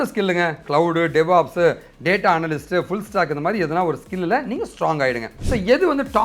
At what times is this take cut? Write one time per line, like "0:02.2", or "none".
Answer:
0:05.3